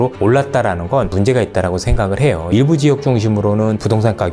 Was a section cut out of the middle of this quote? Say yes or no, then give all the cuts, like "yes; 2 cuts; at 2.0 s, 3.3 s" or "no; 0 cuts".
yes; 2 cuts; at 1.1 s, 2.5 s